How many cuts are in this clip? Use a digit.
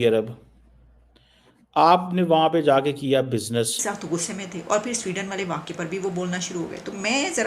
1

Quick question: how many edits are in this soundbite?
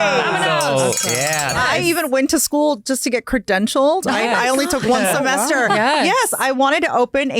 1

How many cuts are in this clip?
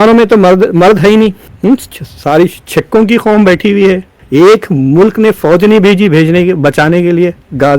2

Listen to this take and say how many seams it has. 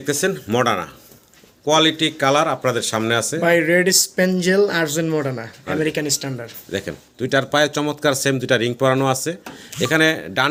0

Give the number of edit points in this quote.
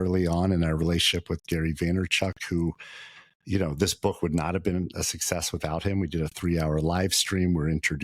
0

